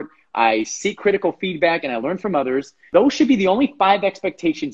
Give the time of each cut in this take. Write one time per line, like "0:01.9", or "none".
0:02.9